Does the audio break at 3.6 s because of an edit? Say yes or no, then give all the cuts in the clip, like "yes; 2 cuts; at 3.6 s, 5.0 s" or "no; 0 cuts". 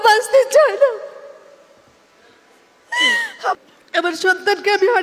yes; 1 cut; at 3.6 s